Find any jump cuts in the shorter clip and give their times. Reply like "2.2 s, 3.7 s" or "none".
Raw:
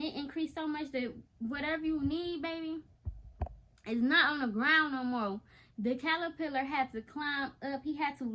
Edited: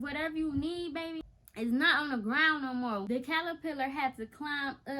1.2 s, 3.0 s